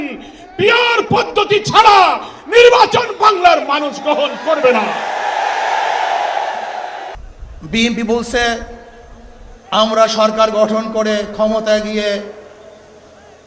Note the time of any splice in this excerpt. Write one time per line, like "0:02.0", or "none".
0:07.1

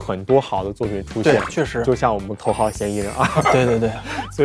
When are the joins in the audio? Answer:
0:02.3

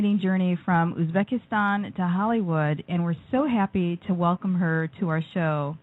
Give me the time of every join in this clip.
0:03.1

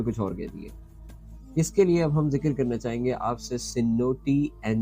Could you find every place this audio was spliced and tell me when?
0:01.3

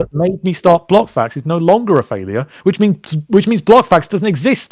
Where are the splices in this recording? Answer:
none

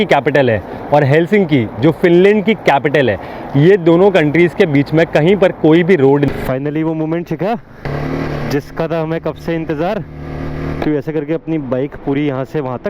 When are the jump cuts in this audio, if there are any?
0:06.3
0:07.9
0:10.8

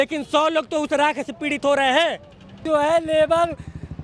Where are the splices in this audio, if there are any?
0:02.6

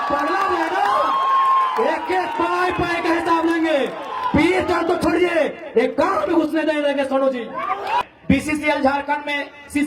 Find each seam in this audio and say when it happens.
0:08.0

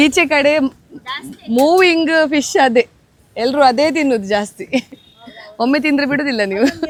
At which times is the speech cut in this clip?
none

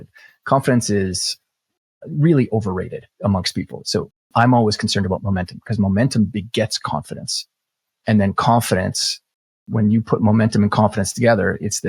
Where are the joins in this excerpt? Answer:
0:03.0
0:05.2
0:07.3

